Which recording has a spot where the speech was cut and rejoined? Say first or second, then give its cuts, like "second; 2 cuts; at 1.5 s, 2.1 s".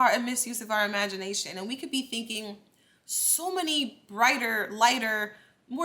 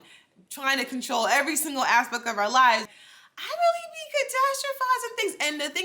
second; 1 cut; at 3.0 s